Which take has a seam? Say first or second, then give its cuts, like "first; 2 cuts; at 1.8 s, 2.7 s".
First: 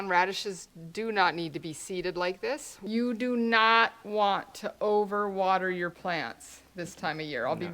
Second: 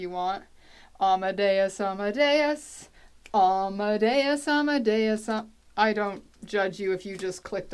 first; 1 cut; at 2.7 s